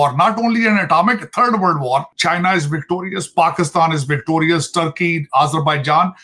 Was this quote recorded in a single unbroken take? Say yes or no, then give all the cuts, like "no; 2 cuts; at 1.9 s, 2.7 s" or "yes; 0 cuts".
no; 1 cut; at 2.1 s